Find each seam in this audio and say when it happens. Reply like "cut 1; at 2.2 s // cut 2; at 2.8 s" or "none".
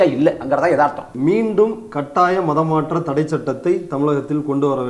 cut 1; at 1.1 s